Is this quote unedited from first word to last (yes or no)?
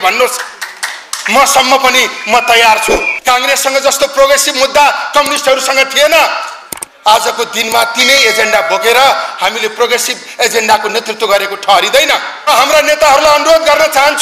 no